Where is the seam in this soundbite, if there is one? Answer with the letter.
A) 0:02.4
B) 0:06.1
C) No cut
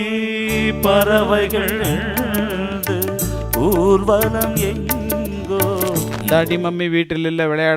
B